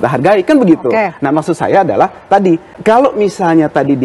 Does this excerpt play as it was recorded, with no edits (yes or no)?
no